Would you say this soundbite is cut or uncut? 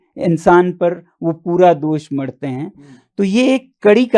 uncut